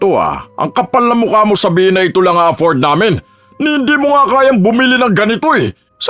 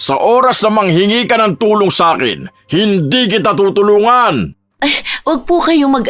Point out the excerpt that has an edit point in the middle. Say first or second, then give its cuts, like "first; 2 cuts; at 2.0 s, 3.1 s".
second; 1 cut; at 4.6 s